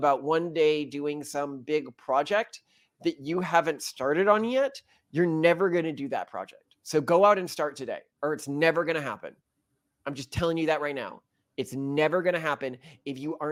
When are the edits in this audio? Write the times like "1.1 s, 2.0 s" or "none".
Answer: none